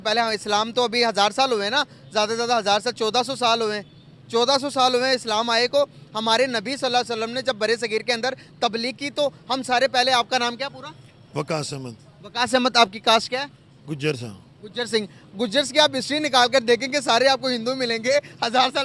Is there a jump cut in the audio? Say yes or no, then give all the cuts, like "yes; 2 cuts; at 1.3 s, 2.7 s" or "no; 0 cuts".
no; 0 cuts